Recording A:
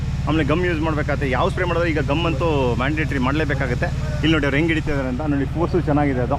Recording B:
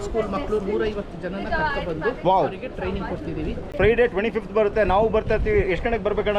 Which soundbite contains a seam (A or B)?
B